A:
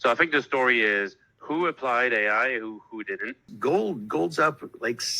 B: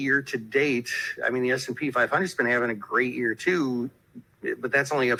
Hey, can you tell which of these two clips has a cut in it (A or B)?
A